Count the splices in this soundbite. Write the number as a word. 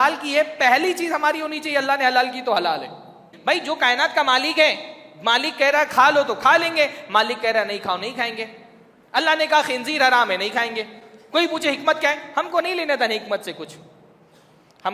one